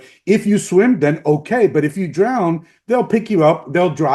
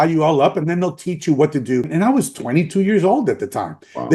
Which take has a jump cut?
second; 1 cut; at 1.9 s

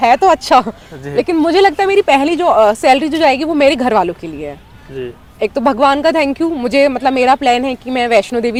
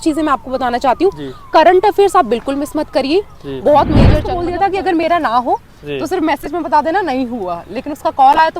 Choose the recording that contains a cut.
second; 1 cut; at 4.3 s

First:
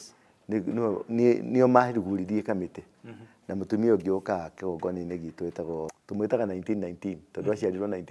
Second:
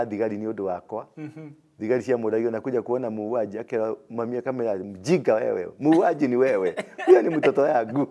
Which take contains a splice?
first; 1 cut; at 5.9 s

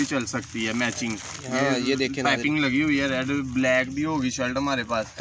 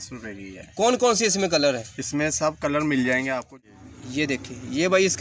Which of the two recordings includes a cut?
second; 1 cut; at 3.5 s

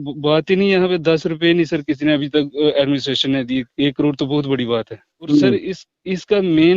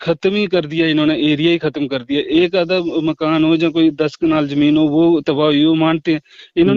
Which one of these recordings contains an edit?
first; 1 cut; at 5.3 s

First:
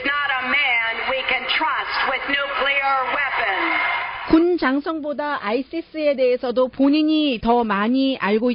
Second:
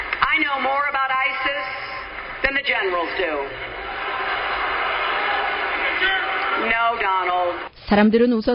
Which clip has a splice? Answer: first; 1 cut; at 4.1 s

